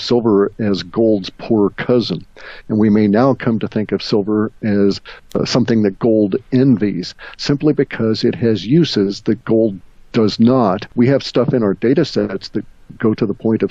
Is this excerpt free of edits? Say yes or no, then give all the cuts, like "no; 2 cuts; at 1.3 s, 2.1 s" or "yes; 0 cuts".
no; 2 cuts; at 5.3 s, 10.8 s